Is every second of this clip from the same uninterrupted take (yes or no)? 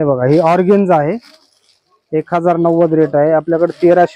yes